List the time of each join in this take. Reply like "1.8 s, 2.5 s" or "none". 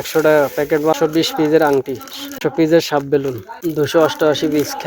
1.0 s, 2.4 s, 3.5 s